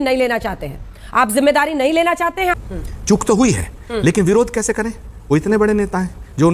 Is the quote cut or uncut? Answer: cut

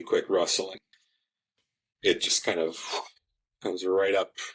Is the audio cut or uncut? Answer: uncut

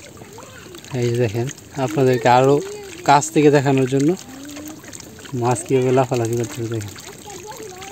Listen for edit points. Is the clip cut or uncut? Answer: uncut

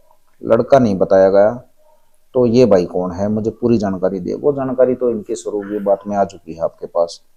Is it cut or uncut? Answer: uncut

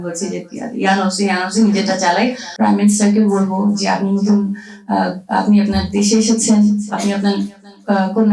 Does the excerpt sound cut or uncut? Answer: cut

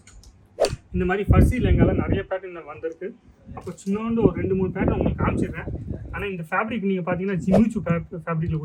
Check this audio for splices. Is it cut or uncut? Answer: uncut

